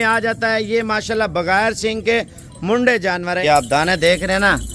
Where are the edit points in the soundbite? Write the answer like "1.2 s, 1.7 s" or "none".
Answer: 3.4 s